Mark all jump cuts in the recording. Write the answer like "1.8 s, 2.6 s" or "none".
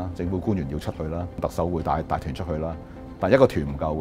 none